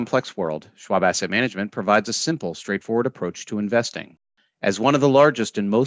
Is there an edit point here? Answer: no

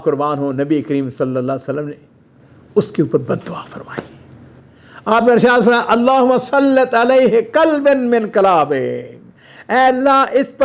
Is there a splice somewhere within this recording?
no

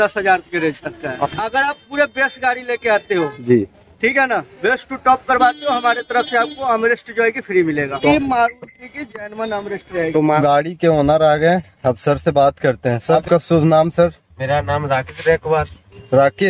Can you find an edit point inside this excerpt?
yes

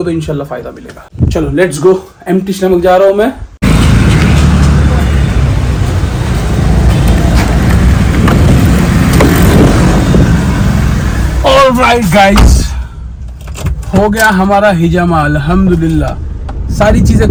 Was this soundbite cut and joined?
no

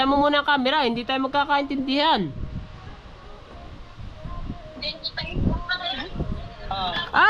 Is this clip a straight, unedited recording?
yes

